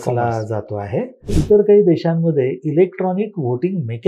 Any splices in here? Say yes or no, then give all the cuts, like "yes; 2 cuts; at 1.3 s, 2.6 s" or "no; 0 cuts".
yes; 1 cut; at 1.3 s